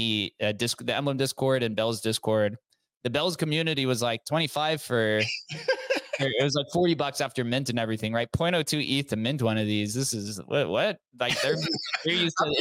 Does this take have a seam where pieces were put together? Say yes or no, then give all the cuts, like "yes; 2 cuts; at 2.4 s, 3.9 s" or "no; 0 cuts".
no; 0 cuts